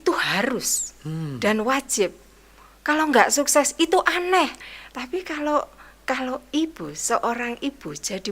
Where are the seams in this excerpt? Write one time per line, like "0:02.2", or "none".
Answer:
0:04.7